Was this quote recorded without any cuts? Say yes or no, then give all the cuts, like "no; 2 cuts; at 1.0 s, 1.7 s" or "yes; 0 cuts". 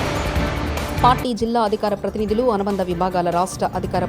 no; 1 cut; at 0.9 s